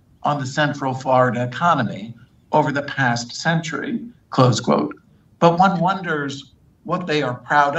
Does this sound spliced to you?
no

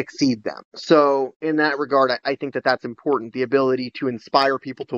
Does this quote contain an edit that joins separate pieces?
no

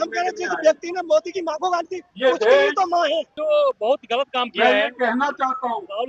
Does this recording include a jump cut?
yes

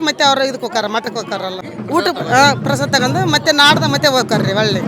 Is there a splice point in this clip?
yes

